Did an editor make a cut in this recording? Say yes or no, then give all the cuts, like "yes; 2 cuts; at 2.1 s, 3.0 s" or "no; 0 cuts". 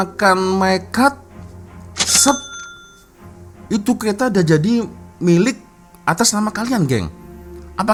no; 0 cuts